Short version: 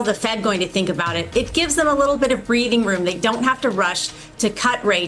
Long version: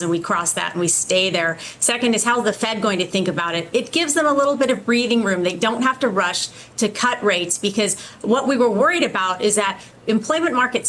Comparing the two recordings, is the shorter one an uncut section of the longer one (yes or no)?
yes